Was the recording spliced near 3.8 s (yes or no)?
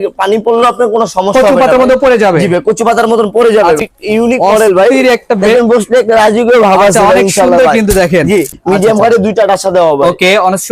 yes